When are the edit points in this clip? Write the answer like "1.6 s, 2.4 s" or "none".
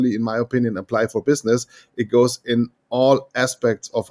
none